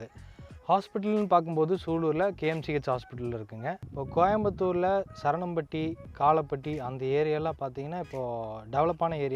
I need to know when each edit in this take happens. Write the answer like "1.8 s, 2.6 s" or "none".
3.9 s